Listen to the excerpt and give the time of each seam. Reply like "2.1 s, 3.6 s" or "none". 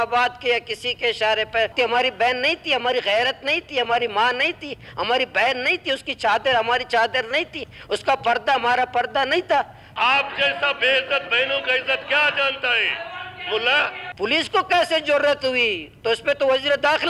1.7 s, 9.8 s, 14.0 s